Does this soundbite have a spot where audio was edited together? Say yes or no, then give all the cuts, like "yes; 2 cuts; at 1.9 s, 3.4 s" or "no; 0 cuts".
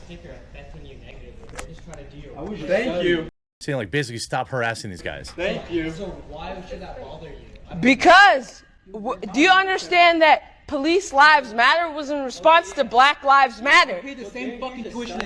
no; 0 cuts